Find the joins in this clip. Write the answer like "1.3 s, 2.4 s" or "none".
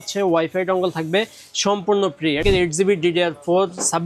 2.4 s